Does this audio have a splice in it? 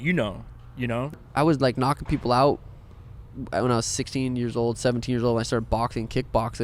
yes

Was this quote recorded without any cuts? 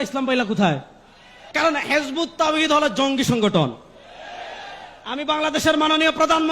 no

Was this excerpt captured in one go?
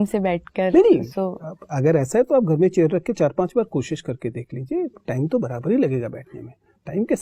yes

